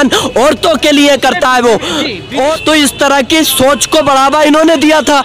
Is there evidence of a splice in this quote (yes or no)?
yes